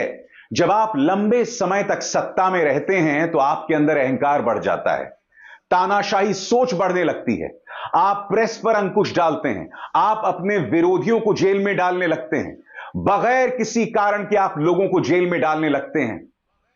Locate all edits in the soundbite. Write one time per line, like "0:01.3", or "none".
none